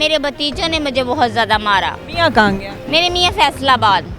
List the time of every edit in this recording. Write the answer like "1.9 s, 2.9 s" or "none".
2.0 s